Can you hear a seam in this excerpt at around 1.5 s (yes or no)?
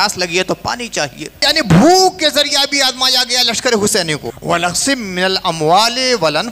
yes